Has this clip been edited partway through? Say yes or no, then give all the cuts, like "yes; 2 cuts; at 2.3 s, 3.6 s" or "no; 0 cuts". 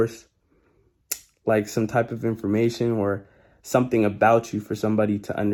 no; 0 cuts